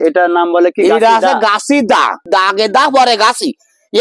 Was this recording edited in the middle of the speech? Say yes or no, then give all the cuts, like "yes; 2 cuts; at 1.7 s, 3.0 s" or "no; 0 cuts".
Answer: yes; 1 cut; at 2.2 s